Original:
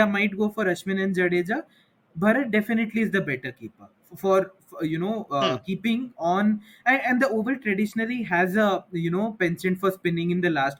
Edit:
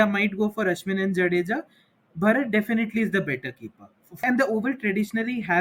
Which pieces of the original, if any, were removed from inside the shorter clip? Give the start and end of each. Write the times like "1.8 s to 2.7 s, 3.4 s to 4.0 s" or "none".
4.2 s to 7.0 s